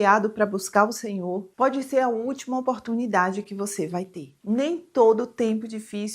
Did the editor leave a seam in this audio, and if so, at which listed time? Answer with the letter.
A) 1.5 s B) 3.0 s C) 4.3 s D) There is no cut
C